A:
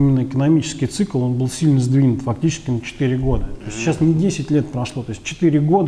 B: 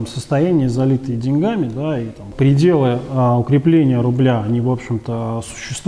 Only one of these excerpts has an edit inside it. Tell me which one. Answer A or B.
B